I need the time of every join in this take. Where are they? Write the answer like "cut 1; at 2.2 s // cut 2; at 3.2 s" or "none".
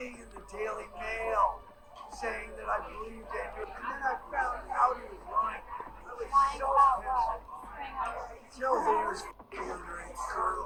none